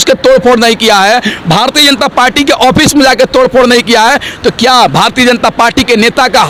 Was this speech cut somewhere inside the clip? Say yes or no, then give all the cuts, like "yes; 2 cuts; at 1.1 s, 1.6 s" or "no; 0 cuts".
no; 0 cuts